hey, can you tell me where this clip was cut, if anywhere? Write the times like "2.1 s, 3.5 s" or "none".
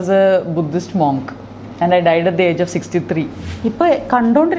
3.4 s